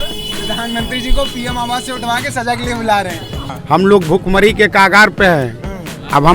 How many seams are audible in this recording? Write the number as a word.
one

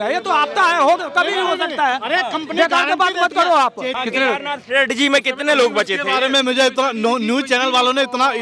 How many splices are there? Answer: one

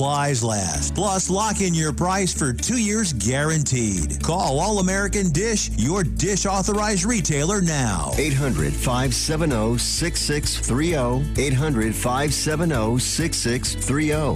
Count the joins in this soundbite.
zero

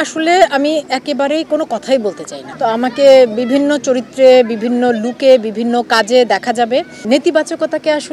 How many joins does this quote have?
two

